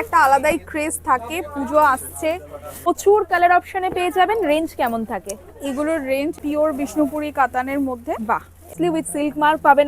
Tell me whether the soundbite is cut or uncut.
cut